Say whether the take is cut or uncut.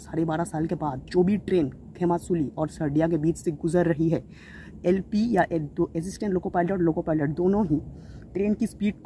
uncut